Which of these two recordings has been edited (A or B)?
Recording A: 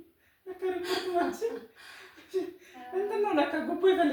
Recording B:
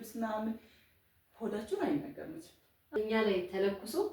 B